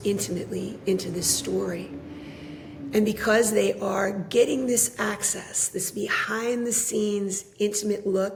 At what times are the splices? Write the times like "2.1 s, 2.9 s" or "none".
none